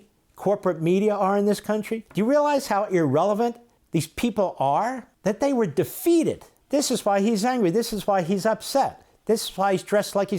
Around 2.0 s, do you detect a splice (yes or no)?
yes